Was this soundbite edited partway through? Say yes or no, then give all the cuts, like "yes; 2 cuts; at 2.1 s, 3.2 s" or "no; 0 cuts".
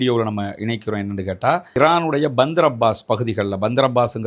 yes; 1 cut; at 1.8 s